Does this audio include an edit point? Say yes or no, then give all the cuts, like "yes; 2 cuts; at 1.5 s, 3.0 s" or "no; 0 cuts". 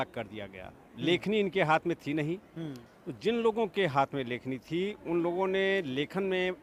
no; 0 cuts